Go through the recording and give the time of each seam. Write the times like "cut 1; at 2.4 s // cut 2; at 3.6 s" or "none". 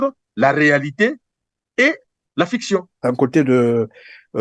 cut 1; at 2.9 s